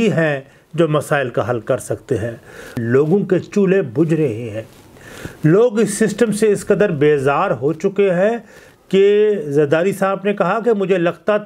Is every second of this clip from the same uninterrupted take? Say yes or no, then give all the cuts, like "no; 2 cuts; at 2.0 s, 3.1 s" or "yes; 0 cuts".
no; 1 cut; at 2.8 s